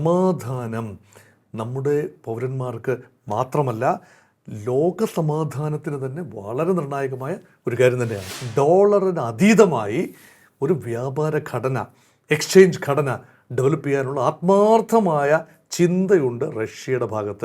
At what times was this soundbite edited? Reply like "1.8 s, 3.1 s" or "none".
8.3 s

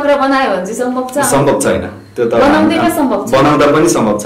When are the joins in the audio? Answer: none

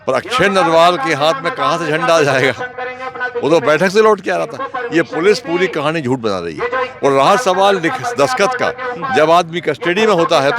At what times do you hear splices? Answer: none

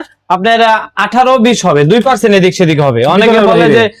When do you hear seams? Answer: none

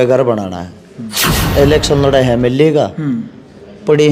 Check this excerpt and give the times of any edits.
1.3 s

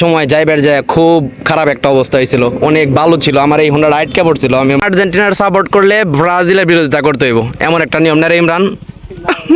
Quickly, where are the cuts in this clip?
4.8 s

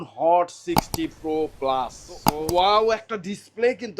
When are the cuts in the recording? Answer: 2.2 s

